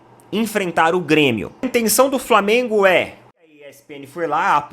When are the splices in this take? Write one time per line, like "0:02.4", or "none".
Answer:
0:03.5